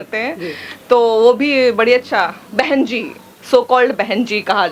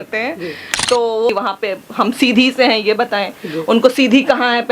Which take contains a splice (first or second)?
second